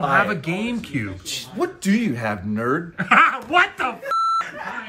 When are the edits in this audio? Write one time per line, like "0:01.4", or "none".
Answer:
none